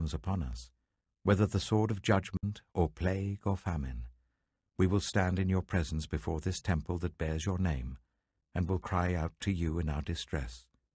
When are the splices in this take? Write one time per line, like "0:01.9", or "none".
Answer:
0:05.1